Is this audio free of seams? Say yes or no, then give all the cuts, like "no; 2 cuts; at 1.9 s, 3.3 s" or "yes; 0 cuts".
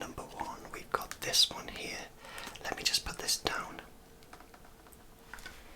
yes; 0 cuts